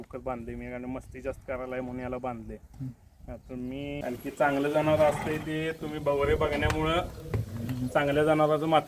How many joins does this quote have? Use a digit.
1